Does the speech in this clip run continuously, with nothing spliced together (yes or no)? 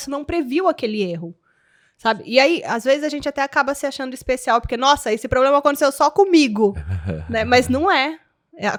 yes